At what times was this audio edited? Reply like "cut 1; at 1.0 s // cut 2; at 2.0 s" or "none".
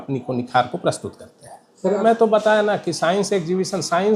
cut 1; at 2.0 s